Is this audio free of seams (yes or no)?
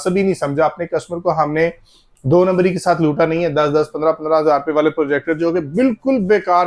yes